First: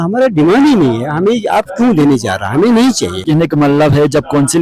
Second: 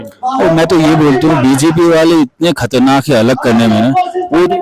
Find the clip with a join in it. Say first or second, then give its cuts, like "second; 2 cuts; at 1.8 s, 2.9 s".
first; 1 cut; at 3.2 s